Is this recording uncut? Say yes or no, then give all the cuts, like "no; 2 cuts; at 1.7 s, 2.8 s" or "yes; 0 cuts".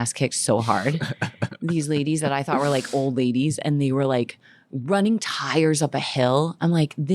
yes; 0 cuts